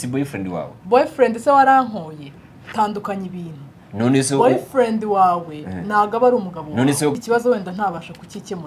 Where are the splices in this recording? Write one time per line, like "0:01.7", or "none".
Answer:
0:07.2